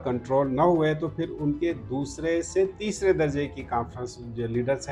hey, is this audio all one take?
yes; 0 cuts

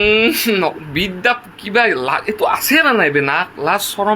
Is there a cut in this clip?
no; 0 cuts

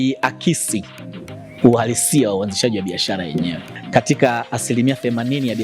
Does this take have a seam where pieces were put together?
yes; 1 cut; at 3.7 s

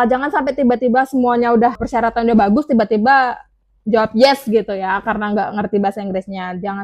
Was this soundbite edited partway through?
yes; 1 cut; at 1.8 s

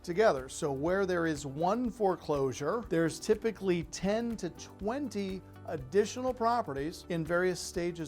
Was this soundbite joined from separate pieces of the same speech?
yes; 2 cuts; at 2.8 s, 7.0 s

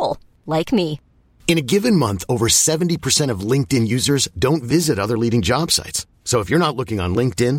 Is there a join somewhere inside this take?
no; 0 cuts

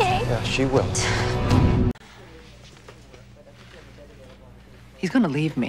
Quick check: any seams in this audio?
yes; 1 cut; at 2.0 s

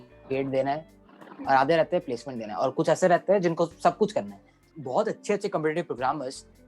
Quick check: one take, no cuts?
no; 1 cut; at 4.7 s

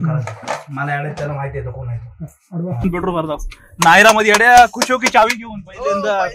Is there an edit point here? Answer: yes; 1 cut; at 2.8 s

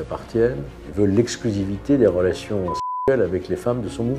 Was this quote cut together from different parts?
no; 0 cuts

